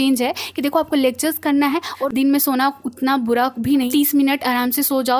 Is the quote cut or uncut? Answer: cut